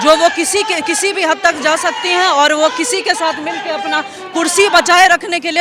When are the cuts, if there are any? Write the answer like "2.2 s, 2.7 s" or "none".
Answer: none